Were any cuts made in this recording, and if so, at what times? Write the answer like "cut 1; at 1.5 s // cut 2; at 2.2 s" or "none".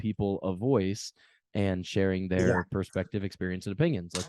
none